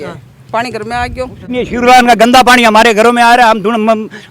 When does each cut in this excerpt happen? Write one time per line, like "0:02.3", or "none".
0:01.5